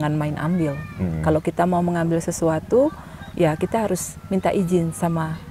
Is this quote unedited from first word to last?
yes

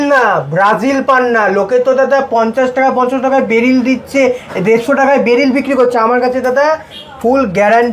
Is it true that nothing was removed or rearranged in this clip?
yes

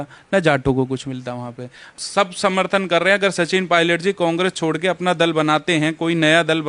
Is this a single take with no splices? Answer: no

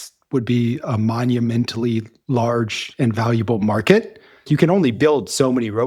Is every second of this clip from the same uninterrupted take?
no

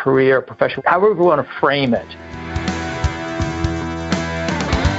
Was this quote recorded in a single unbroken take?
no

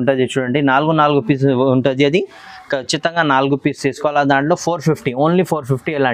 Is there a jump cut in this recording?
no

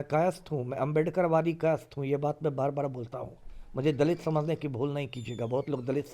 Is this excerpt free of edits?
yes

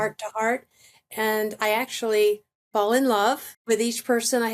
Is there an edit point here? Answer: yes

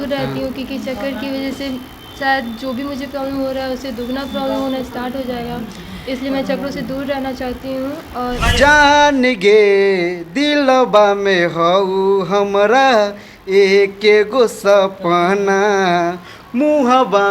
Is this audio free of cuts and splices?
no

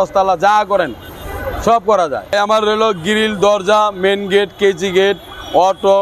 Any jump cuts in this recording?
yes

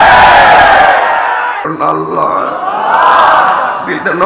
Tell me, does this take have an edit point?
yes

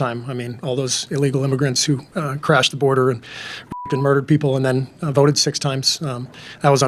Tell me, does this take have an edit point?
no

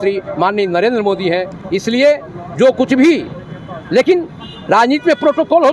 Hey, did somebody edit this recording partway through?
no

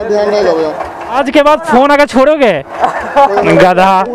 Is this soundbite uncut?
no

